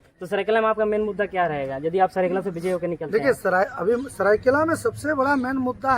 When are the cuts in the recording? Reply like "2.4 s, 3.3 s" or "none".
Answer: none